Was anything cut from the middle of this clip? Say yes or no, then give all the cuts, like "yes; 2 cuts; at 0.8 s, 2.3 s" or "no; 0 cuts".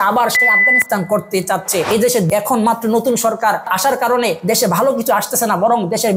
no; 0 cuts